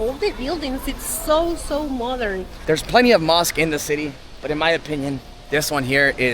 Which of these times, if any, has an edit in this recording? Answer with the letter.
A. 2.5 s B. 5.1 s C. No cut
A